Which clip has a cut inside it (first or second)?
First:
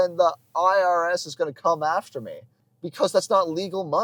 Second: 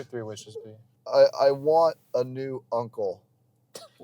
second